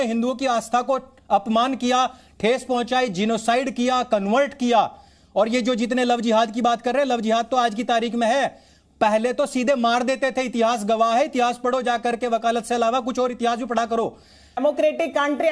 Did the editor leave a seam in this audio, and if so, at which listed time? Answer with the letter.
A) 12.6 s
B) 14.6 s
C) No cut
B